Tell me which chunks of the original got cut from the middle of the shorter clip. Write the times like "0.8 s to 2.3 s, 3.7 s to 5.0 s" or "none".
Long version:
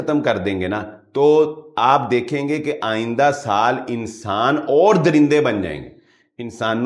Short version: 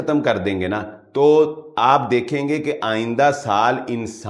none